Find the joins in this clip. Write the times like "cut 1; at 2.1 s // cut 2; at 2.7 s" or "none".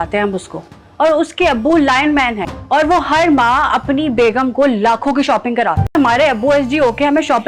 cut 1; at 2.5 s // cut 2; at 5.9 s